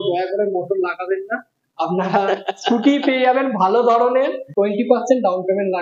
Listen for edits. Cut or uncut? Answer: cut